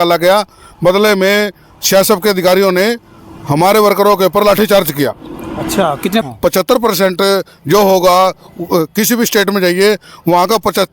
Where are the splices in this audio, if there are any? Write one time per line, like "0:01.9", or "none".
0:06.2